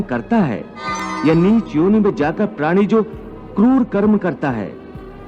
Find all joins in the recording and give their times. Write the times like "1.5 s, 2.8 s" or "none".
1.1 s